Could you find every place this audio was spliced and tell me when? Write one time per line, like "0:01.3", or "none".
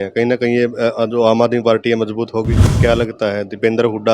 0:02.6